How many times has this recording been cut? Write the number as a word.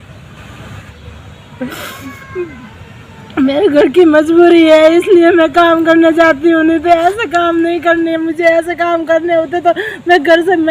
one